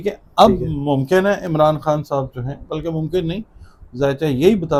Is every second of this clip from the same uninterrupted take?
yes; 0 cuts

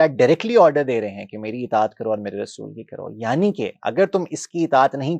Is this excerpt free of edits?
yes; 0 cuts

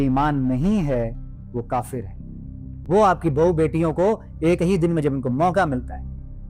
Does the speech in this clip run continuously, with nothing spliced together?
no; 1 cut; at 2.7 s

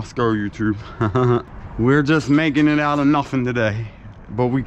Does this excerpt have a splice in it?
yes; 1 cut; at 1.6 s

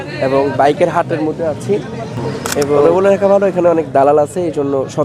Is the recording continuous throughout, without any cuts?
no; 1 cut; at 2.9 s

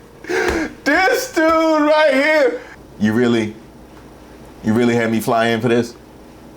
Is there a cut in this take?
yes; 1 cut; at 2.7 s

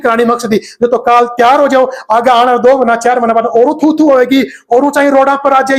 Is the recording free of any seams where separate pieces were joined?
yes; 0 cuts

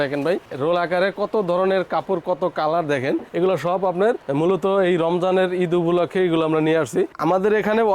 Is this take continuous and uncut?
no; 2 cuts; at 3.3 s, 7.1 s

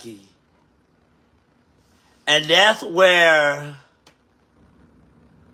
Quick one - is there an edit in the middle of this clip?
no; 0 cuts

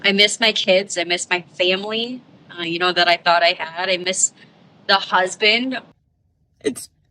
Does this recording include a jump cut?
yes; 2 cuts; at 0.9 s, 5.9 s

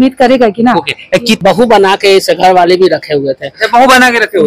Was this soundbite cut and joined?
yes; 1 cut; at 1.4 s

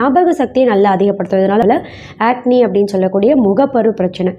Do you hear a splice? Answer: yes; 1 cut; at 1.6 s

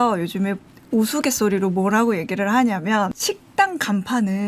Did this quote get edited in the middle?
yes; 1 cut; at 3.2 s

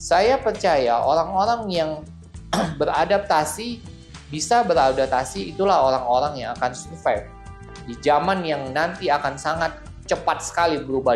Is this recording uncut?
yes; 0 cuts

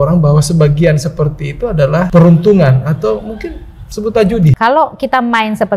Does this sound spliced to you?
yes; 2 cuts; at 2.1 s, 4.5 s

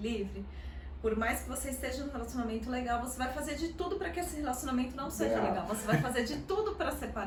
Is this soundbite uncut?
yes; 0 cuts

